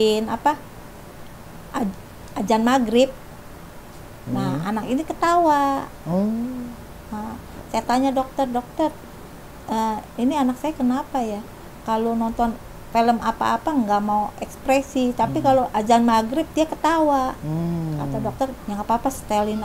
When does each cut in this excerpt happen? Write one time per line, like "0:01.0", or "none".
none